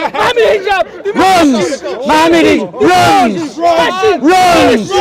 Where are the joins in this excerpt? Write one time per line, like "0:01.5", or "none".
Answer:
none